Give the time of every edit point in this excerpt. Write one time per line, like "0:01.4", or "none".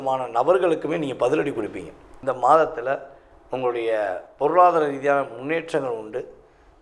0:02.1